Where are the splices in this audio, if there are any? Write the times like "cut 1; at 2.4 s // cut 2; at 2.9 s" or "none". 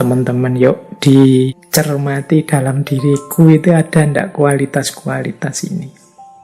cut 1; at 1.6 s

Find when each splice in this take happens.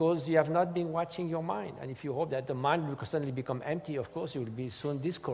cut 1; at 2.5 s

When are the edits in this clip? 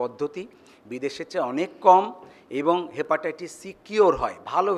none

